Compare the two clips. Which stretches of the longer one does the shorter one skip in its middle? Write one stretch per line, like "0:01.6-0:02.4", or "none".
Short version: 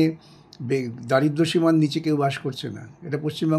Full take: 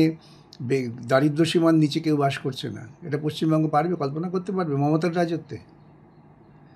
none